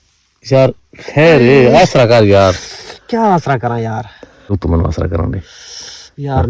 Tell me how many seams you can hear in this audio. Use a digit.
1